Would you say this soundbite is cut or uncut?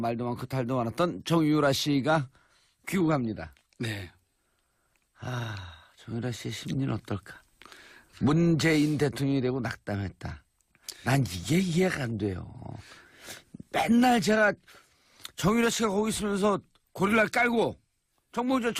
uncut